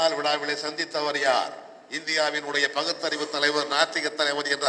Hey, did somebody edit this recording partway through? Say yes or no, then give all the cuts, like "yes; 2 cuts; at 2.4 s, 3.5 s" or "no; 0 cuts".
no; 0 cuts